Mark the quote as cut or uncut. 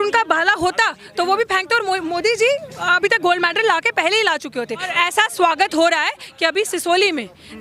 cut